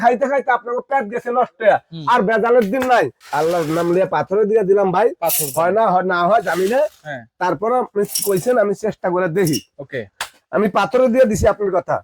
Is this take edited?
yes; 1 cut; at 3.2 s

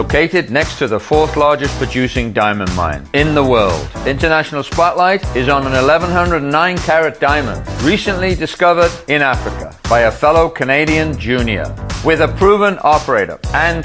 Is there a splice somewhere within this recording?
no; 0 cuts

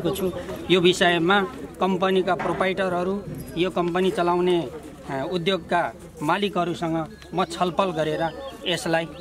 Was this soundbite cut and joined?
no; 0 cuts

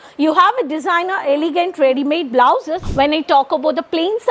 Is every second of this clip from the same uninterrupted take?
no; 1 cut; at 2.8 s

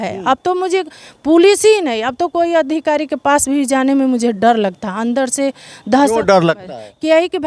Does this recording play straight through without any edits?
yes; 0 cuts

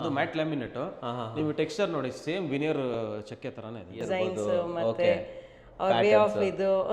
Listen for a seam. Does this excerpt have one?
yes; 1 cut; at 4.0 s

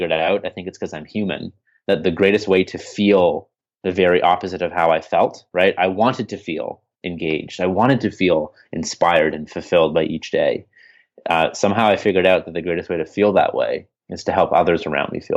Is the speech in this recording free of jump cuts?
yes; 0 cuts

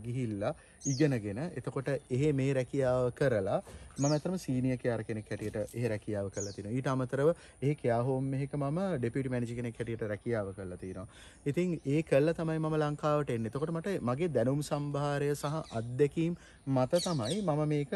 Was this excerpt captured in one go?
yes; 0 cuts

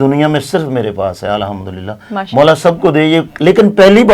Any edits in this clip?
no; 0 cuts

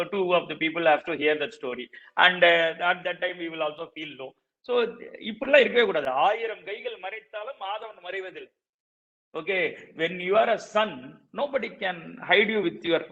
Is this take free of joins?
yes; 0 cuts

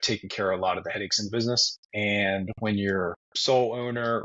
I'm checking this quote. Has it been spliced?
yes; 2 cuts; at 1.8 s, 3.3 s

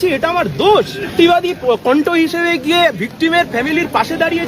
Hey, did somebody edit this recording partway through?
yes; 1 cut; at 1.1 s

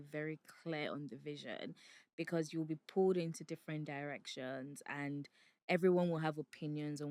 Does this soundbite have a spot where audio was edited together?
no; 0 cuts

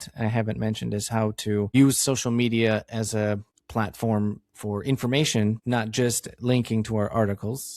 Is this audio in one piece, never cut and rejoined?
no; 3 cuts; at 1.7 s, 3.5 s, 5.6 s

